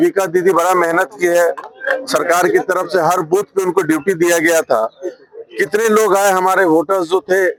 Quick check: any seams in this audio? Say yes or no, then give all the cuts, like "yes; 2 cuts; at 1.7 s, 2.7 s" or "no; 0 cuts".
no; 0 cuts